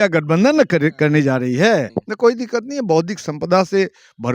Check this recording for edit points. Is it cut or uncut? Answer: cut